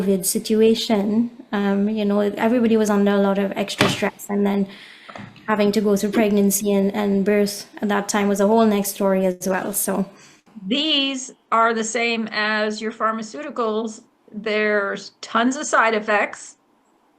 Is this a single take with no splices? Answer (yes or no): no